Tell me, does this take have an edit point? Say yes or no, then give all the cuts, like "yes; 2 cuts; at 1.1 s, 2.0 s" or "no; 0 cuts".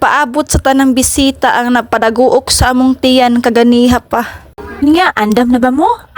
yes; 1 cut; at 4.8 s